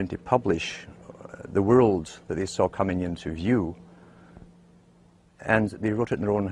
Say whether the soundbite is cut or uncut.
cut